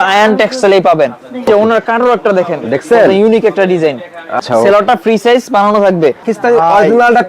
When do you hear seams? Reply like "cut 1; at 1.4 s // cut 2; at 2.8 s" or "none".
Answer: cut 1; at 1.5 s // cut 2; at 4.4 s // cut 3; at 6.3 s